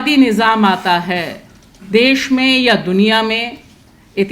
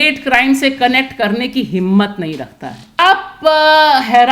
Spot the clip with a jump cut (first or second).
second